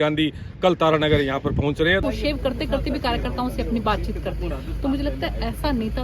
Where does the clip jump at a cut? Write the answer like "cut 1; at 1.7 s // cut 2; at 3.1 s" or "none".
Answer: cut 1; at 2.0 s